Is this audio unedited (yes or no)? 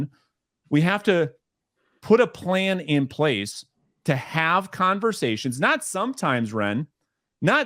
yes